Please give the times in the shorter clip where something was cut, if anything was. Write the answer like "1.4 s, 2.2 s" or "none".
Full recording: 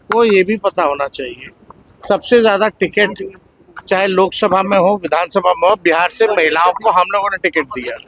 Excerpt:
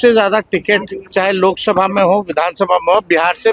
1.0 s